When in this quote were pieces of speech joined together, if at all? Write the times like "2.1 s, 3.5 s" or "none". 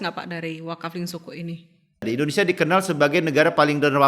2.1 s